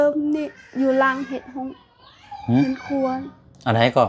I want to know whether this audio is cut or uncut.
uncut